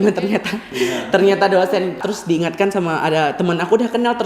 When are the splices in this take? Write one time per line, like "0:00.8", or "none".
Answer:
0:02.0

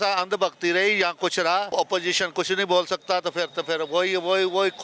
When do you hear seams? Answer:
0:01.7

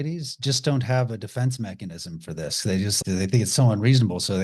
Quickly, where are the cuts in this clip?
0:03.0

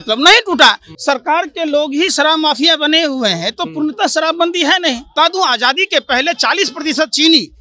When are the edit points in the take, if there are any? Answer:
0:00.9
0:05.1

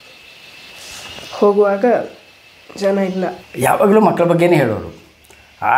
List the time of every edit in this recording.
0:03.4

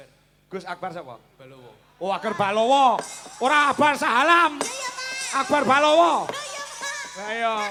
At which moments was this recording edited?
none

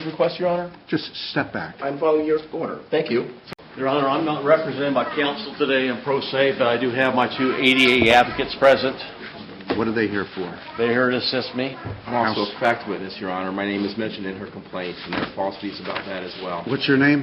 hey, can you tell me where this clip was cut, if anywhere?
0:03.4

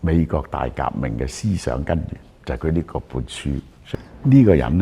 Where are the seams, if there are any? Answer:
0:03.7

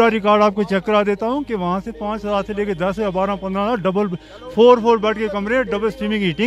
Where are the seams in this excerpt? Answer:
none

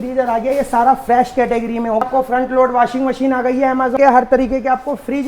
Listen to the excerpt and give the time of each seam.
0:02.0
0:03.9

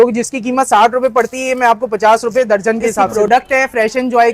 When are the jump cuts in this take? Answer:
0:03.1

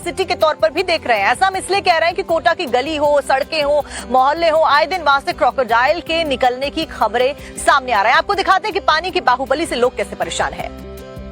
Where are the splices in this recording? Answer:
0:03.2

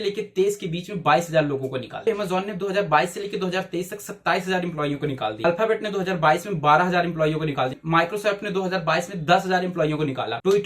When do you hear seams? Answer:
0:02.0
0:05.4
0:07.7

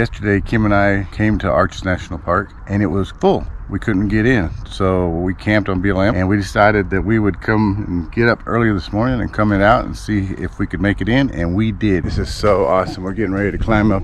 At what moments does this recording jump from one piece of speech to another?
0:01.1
0:02.9
0:06.1
0:12.0

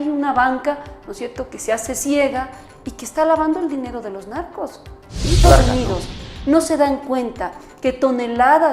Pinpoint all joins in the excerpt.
0:05.4

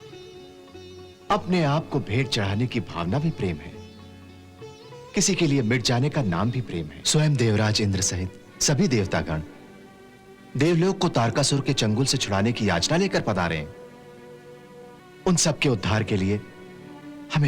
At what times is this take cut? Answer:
0:07.0
0:15.0

